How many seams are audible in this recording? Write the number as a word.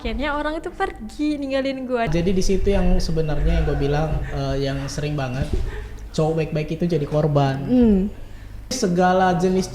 two